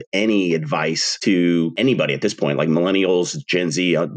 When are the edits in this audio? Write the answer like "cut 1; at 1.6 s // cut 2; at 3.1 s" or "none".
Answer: cut 1; at 1.1 s // cut 2; at 1.7 s